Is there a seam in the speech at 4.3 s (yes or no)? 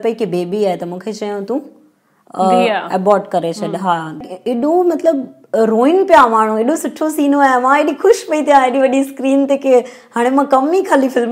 yes